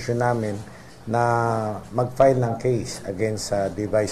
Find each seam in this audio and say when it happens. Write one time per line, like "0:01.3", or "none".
none

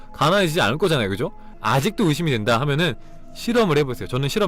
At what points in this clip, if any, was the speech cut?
0:01.6

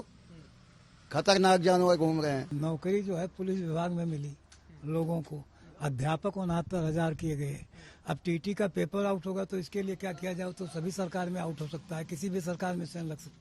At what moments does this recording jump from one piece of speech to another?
0:02.5

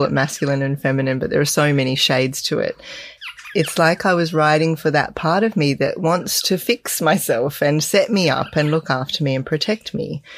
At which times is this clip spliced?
0:03.1

